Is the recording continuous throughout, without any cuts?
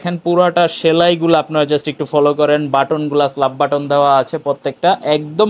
yes; 0 cuts

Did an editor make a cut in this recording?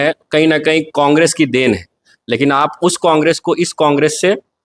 no; 0 cuts

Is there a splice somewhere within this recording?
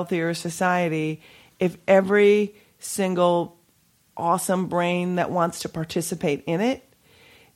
no; 0 cuts

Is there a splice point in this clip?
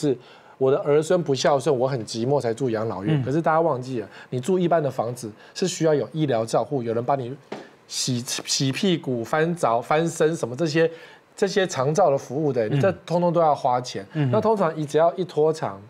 no; 0 cuts

